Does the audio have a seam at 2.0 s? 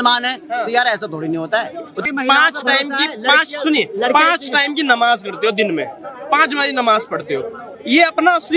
yes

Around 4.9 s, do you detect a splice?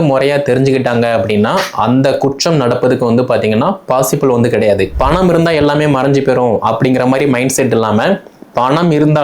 yes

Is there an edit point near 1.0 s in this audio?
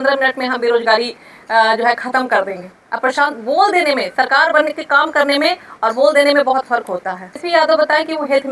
no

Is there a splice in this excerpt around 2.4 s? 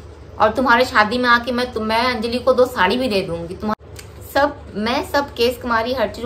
no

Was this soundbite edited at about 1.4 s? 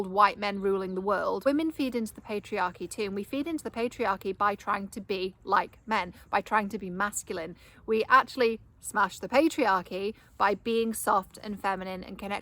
yes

